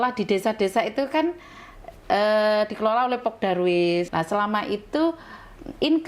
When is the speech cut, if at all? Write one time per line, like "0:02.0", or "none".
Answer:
0:04.1